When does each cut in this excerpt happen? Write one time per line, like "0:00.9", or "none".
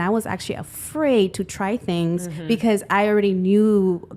none